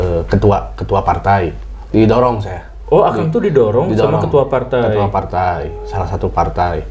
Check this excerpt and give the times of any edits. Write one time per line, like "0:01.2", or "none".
none